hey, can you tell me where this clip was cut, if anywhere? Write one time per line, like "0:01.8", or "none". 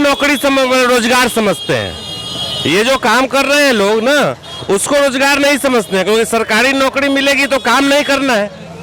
none